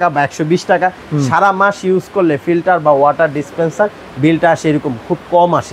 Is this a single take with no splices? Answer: yes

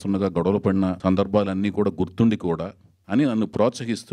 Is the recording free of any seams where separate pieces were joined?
no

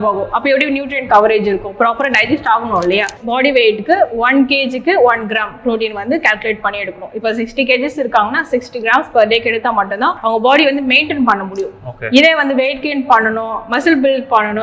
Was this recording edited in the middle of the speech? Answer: yes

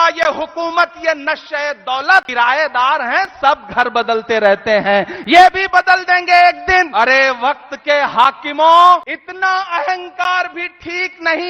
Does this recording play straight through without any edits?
no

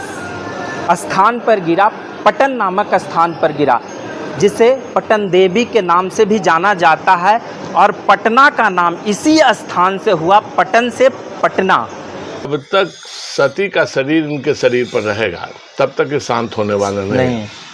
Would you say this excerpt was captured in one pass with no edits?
no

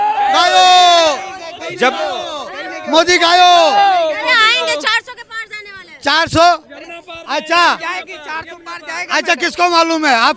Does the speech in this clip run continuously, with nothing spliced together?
yes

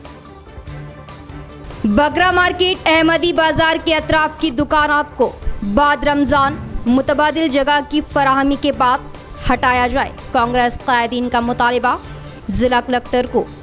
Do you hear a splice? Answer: no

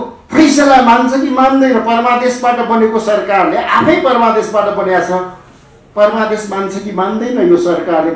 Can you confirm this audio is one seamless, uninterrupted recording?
yes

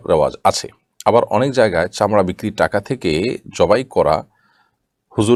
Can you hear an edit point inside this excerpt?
no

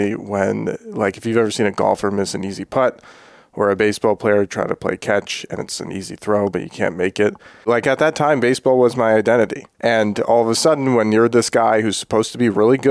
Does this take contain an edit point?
yes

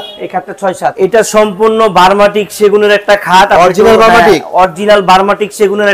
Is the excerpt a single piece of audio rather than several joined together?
no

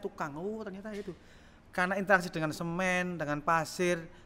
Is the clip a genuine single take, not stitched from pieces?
yes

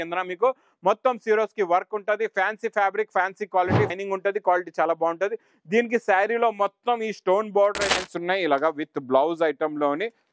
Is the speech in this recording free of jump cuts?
no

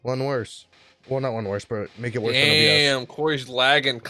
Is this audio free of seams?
yes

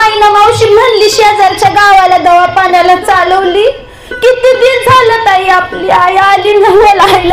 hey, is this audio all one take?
yes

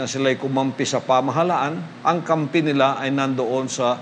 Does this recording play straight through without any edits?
yes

